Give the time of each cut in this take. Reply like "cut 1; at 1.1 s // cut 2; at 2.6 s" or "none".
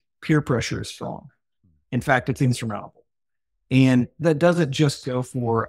cut 1; at 4.2 s